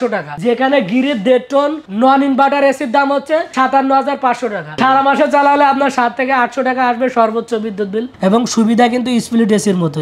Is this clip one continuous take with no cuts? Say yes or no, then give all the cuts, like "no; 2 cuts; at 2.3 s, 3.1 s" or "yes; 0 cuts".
no; 2 cuts; at 4.8 s, 8.1 s